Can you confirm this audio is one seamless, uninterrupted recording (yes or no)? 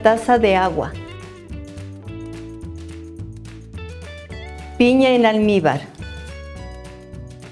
yes